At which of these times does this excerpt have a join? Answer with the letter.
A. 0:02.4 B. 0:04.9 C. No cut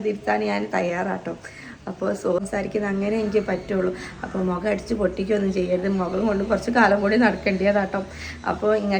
A